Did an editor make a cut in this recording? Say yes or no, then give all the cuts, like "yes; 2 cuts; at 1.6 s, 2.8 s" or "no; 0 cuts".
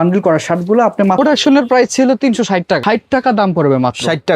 yes; 2 cuts; at 1.2 s, 2.8 s